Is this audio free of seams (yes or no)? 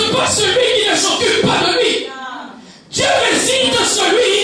yes